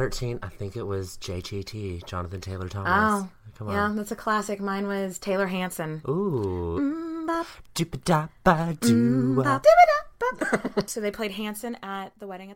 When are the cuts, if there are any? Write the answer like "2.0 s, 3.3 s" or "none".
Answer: 6.0 s, 9.5 s, 10.4 s